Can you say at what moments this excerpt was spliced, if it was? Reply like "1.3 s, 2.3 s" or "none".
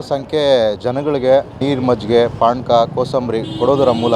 1.6 s